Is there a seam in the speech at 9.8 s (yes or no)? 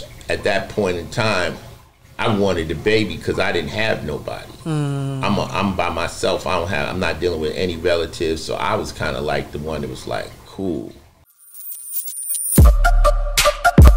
no